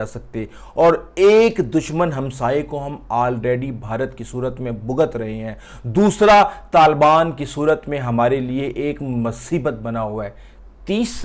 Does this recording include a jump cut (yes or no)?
no